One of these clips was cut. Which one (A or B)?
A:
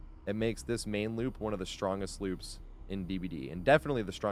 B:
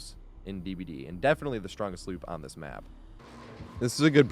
B